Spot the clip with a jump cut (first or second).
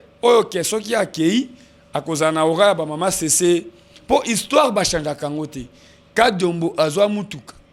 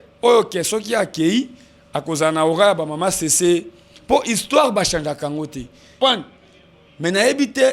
second